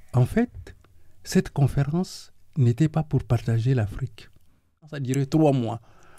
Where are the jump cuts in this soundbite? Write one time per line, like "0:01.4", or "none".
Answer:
0:04.9